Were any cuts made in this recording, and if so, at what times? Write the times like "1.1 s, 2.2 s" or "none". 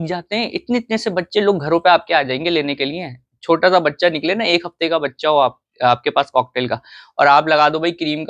none

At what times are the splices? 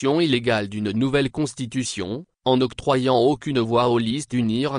1.9 s

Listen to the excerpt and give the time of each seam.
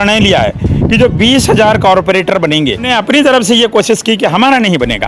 2.9 s

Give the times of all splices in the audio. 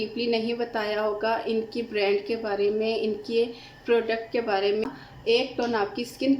4.8 s

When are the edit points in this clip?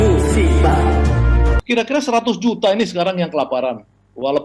1.6 s

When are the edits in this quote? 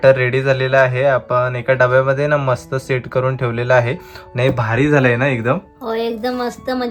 none

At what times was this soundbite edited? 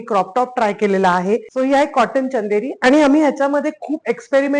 1.5 s

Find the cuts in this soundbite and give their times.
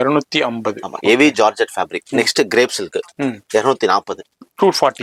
2.1 s

